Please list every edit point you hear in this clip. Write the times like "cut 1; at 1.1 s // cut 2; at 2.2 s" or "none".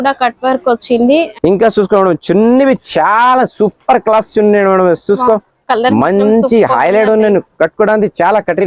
cut 1; at 1.3 s